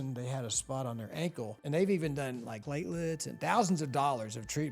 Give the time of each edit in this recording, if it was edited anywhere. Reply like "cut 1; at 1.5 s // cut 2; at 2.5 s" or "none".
cut 1; at 1.5 s // cut 2; at 2.6 s